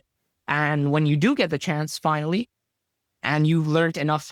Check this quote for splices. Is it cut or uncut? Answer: uncut